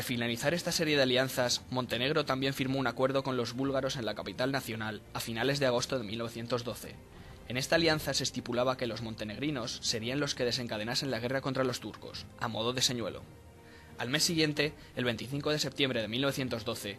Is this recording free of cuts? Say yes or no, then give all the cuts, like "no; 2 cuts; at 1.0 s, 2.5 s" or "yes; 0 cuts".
yes; 0 cuts